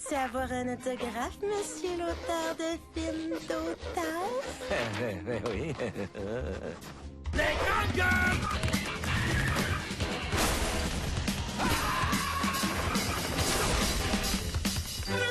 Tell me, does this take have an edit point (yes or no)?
no